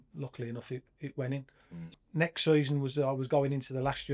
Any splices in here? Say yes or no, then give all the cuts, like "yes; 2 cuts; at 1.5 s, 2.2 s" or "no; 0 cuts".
yes; 1 cut; at 1.9 s